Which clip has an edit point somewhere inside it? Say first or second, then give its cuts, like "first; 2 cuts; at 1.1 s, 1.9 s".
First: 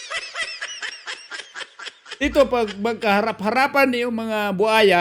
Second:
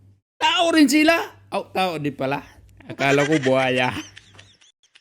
first; 1 cut; at 2.2 s